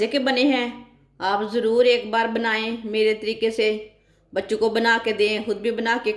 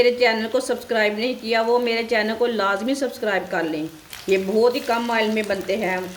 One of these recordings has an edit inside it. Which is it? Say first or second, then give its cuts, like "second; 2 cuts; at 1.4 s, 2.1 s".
second; 1 cut; at 4.1 s